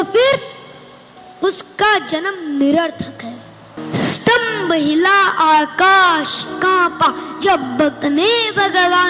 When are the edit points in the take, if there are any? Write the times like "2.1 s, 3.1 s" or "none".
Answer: 3.8 s